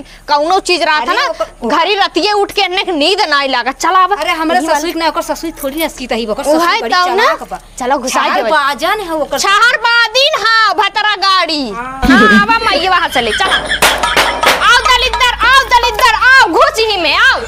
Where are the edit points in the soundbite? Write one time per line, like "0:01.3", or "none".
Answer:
none